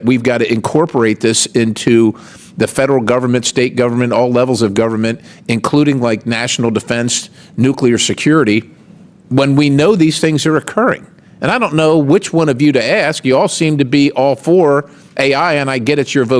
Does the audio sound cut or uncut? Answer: uncut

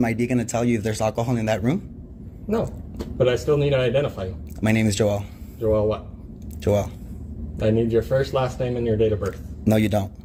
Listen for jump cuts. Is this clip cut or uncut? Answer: uncut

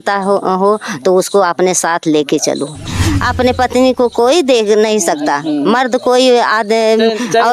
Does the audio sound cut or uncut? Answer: cut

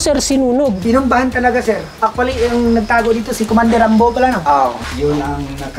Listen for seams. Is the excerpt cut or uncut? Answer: cut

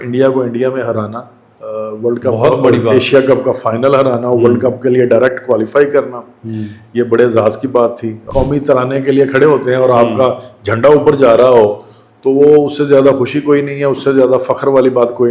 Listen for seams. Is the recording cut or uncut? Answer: cut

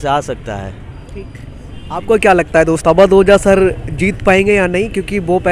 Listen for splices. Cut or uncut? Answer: uncut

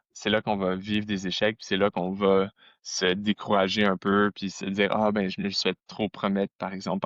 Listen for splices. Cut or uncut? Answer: uncut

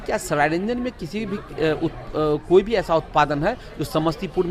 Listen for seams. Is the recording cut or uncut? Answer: uncut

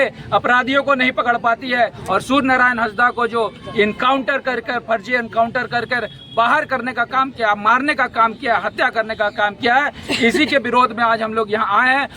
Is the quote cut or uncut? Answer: uncut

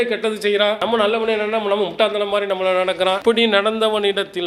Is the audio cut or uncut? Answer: uncut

